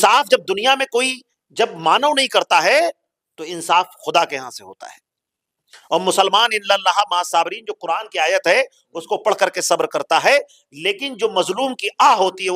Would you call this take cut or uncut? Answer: uncut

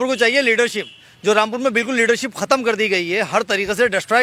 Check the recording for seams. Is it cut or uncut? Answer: uncut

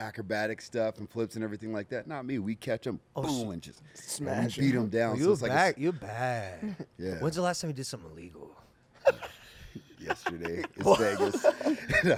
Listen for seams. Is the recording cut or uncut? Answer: uncut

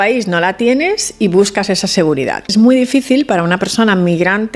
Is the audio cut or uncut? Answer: cut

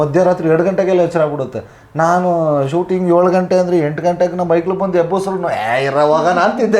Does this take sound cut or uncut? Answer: uncut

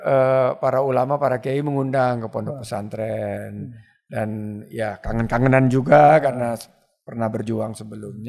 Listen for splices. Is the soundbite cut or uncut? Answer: uncut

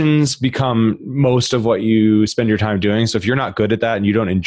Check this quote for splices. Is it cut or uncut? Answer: uncut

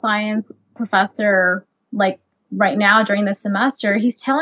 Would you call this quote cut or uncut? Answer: uncut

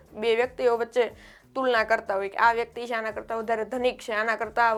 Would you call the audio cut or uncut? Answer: uncut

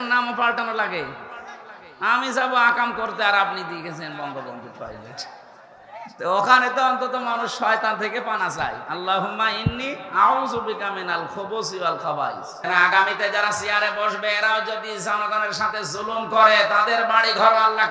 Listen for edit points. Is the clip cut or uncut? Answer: cut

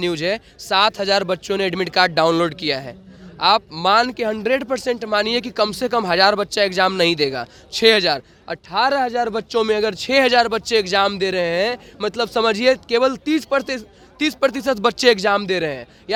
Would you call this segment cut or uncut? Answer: uncut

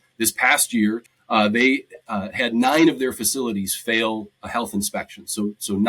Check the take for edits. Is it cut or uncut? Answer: cut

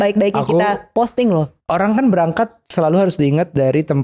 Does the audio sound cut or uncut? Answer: cut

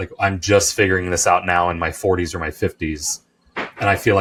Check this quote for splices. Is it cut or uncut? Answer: uncut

